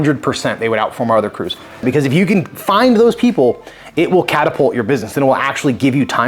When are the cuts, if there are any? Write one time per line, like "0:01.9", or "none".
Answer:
0:01.8
0:02.6